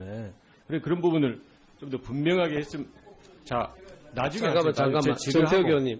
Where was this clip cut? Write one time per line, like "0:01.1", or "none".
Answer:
0:01.7